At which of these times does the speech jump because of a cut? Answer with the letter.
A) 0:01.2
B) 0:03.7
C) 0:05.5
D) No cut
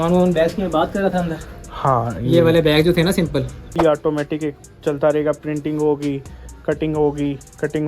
B